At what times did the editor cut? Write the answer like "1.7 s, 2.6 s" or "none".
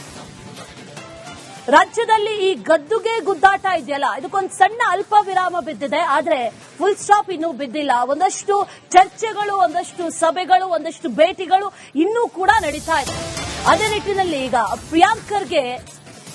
1.4 s